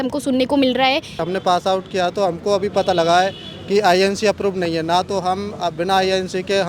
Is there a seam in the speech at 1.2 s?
yes; 1 cut; at 1.2 s

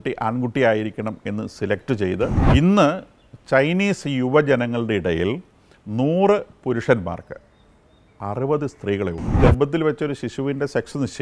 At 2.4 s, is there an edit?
yes; 2 cuts; at 2.4 s, 9.4 s

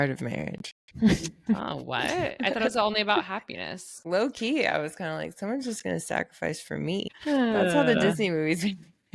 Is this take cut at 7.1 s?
yes; 2 cuts; at 4.0 s, 7.1 s

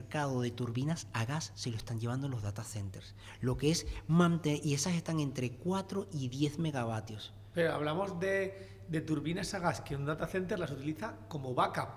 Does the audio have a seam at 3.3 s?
no; 0 cuts

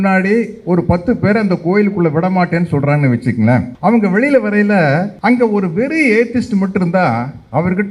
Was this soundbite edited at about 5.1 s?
yes; 2 cuts; at 3.7 s, 5.1 s

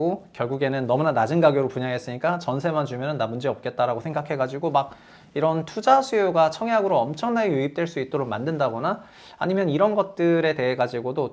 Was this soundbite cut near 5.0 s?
no; 0 cuts

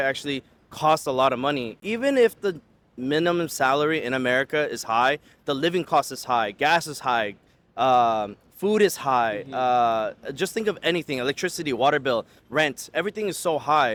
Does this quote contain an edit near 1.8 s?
no; 0 cuts

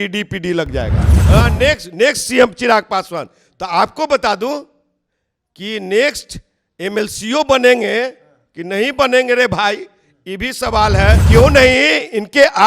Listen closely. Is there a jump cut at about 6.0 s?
no; 2 cuts; at 1.1 s, 11.2 s

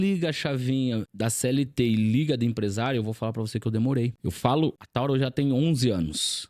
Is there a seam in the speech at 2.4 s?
no; 3 cuts; at 1.1 s, 4.2 s, 4.8 s

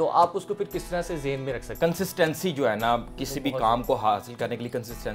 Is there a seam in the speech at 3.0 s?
no; 1 cut; at 1.7 s

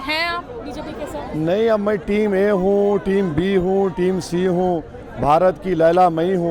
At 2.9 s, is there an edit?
no; 0 cuts

